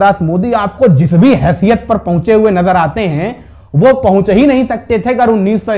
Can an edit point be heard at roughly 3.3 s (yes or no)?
no